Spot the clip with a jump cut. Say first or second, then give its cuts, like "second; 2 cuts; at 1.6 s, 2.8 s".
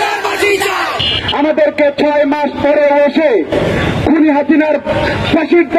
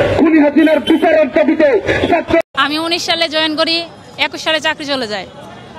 second; 1 cut; at 2.4 s